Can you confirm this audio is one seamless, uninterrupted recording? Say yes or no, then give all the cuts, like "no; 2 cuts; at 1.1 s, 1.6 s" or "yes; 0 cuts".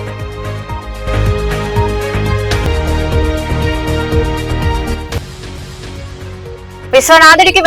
no; 1 cut; at 1.0 s